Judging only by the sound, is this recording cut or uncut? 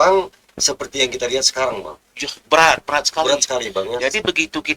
uncut